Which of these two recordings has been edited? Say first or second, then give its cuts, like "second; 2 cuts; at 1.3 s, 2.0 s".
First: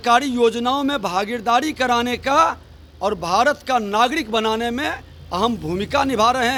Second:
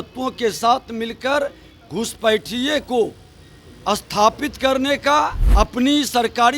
second; 1 cut; at 5.4 s